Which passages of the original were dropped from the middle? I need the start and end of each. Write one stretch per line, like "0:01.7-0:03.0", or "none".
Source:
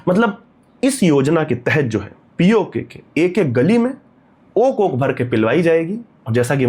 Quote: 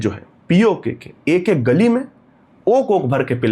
none